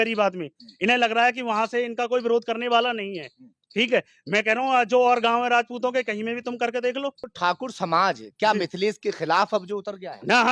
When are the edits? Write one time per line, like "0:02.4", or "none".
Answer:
0:07.3